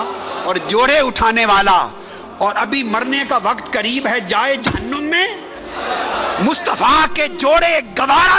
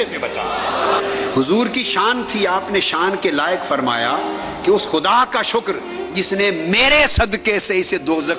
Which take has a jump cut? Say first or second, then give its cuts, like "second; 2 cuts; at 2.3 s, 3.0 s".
second; 1 cut; at 1.0 s